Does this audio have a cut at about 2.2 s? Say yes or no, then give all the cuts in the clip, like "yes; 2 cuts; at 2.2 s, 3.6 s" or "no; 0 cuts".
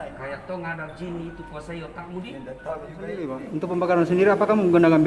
no; 1 cut; at 3.4 s